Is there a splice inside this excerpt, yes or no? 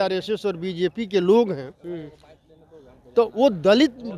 no